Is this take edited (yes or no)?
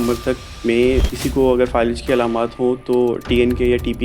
yes